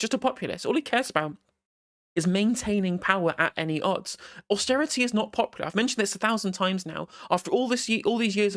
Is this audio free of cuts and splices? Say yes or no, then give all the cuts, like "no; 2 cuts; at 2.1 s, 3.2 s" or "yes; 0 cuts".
yes; 0 cuts